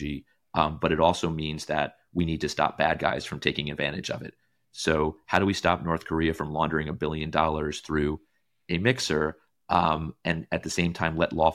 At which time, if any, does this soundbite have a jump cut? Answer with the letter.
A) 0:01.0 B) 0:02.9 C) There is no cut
C